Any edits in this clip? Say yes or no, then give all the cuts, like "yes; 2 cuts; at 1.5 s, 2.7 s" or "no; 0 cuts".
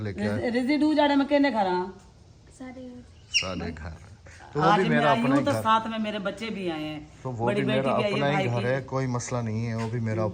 no; 0 cuts